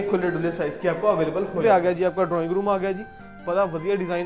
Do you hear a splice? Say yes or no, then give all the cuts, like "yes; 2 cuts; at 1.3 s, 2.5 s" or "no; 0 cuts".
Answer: yes; 1 cut; at 1.6 s